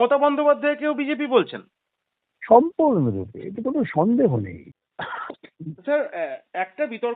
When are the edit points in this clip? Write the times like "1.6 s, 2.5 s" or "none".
4.8 s